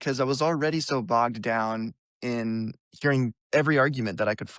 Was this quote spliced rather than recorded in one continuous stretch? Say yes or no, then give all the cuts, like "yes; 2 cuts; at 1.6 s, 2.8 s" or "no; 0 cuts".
yes; 1 cut; at 3.4 s